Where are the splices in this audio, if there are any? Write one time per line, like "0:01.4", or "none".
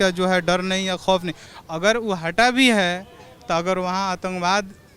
0:01.4